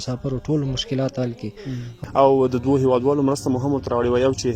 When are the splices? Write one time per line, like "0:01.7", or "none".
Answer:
0:02.0